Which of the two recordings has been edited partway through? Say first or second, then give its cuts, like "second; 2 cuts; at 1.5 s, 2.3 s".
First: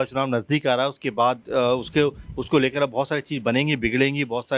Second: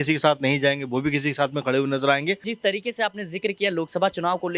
second; 1 cut; at 2.5 s